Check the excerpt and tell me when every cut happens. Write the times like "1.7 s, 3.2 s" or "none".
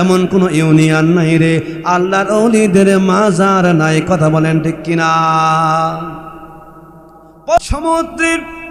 7.8 s